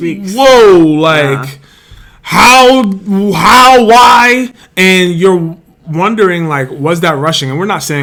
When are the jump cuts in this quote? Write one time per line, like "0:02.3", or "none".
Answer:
none